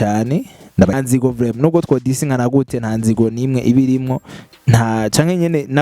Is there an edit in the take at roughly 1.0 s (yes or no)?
yes